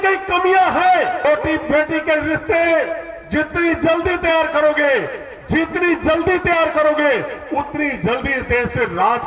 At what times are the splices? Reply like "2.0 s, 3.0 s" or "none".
1.2 s